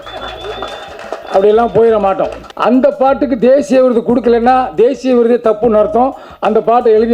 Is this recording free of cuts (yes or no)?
no